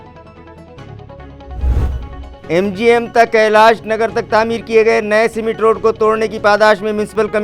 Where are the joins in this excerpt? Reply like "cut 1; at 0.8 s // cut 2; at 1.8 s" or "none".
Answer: cut 1; at 2.2 s